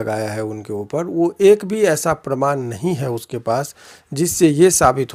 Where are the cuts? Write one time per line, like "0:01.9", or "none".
none